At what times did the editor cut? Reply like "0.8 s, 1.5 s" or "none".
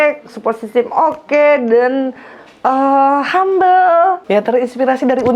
4.2 s

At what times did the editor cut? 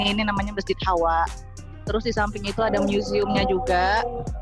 none

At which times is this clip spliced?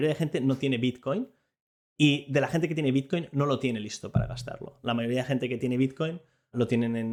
none

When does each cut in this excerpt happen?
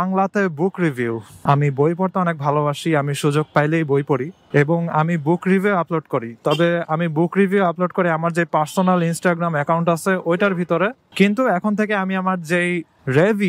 none

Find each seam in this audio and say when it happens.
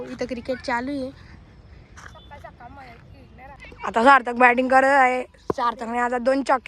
3.6 s

